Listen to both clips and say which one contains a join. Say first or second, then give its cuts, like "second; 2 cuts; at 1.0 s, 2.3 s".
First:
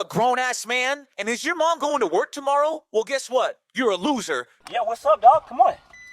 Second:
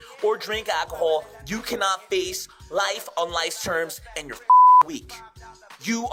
first; 1 cut; at 4.5 s